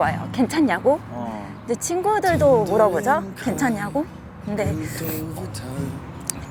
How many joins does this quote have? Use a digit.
0